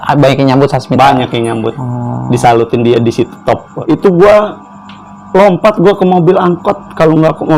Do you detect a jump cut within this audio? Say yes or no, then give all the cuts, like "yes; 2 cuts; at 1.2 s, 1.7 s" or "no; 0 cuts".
yes; 1 cut; at 3.8 s